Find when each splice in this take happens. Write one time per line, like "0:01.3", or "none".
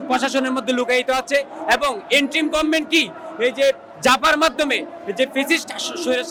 none